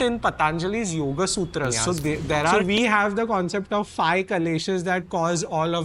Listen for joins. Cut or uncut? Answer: cut